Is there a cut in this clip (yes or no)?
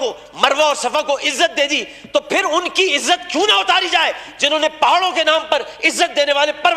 no